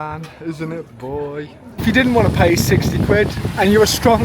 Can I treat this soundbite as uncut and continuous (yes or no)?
no